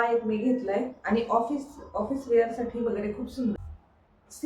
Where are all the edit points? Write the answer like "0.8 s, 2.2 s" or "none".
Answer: 3.5 s